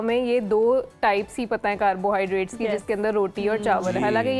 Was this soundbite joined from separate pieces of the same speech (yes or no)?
no